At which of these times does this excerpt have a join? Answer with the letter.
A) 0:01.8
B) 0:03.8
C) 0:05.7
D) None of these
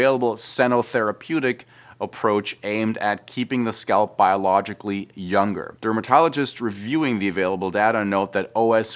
C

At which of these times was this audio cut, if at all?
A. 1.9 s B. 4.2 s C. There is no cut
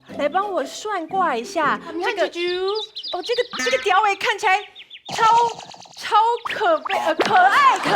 A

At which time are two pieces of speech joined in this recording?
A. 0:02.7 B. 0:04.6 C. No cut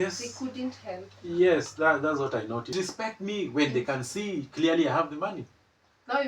A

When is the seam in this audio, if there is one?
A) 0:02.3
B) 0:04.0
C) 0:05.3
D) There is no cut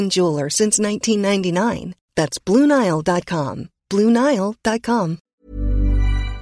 C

